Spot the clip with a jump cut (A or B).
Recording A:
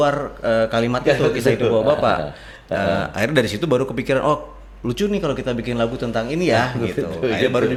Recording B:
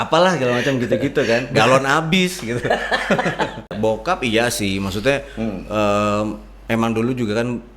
B